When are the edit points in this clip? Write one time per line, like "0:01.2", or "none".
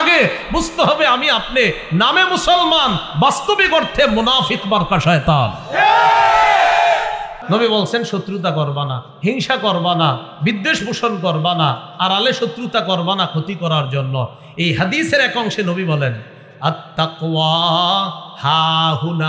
0:07.3